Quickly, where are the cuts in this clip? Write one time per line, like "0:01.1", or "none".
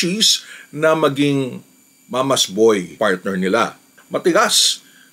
0:02.9
0:04.0